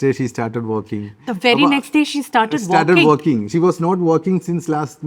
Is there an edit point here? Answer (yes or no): no